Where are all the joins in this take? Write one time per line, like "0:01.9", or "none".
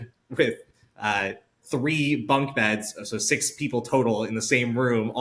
none